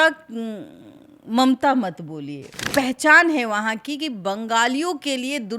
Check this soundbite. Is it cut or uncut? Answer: cut